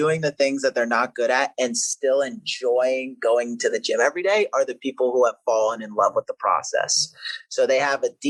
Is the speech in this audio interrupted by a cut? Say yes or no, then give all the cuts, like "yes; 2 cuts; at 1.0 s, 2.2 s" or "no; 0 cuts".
no; 0 cuts